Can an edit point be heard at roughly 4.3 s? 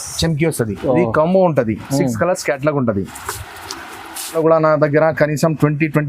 yes; 1 cut; at 4.3 s

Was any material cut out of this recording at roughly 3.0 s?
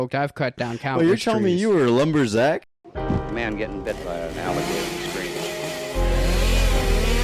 yes; 1 cut; at 3.0 s

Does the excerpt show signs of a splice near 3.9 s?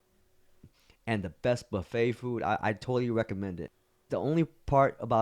yes; 1 cut; at 3.9 s

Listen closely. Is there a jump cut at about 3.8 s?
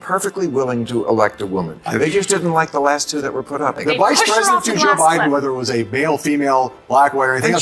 yes; 1 cut; at 3.8 s

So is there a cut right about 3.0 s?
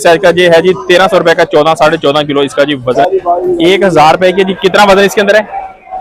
yes; 1 cut; at 3.0 s

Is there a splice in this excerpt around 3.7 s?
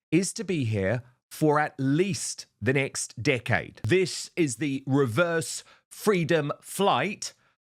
yes; 1 cut; at 3.7 s

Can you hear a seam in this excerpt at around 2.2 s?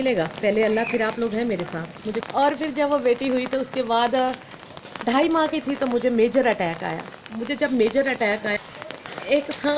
yes; 2 cuts; at 2.2 s, 8.7 s

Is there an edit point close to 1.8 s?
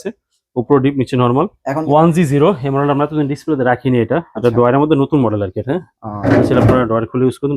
yes; 1 cut; at 1.8 s

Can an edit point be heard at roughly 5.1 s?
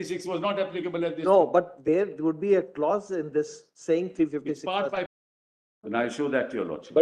yes; 1 cut; at 5.1 s

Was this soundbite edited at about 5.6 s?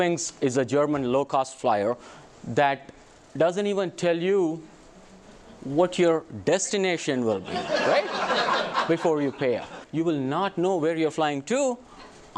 no; 1 cut; at 9.8 s

